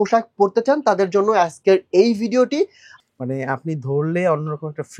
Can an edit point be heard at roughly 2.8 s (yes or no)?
yes